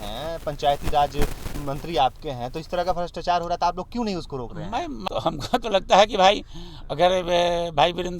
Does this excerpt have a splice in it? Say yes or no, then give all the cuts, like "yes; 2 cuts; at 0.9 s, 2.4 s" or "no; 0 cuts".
yes; 1 cut; at 5.1 s